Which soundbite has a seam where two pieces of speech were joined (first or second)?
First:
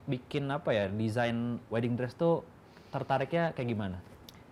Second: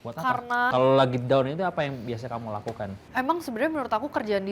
second